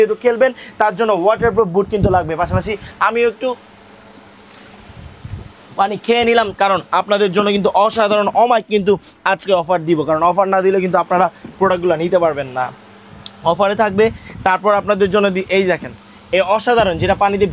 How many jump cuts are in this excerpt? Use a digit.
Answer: 0